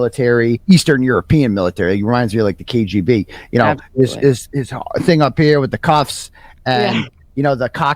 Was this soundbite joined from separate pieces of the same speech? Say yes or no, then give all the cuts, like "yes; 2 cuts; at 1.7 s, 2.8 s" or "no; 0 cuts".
no; 0 cuts